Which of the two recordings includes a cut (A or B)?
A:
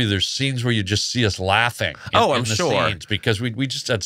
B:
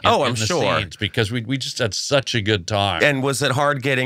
B